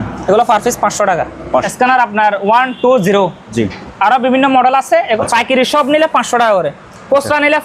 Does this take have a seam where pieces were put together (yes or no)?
yes